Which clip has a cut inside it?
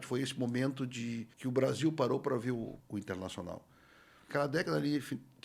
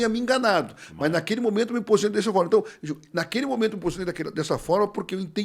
first; 3 cuts; at 1.3 s, 2.8 s, 4.3 s

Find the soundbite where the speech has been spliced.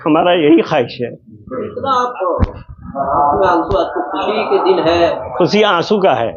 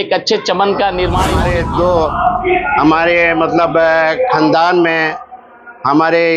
second; 1 cut; at 1.4 s

